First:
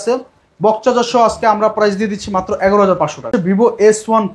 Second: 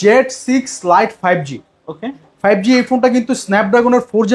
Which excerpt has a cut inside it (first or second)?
first